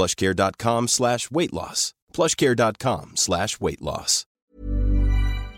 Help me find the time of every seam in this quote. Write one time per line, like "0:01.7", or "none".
0:04.3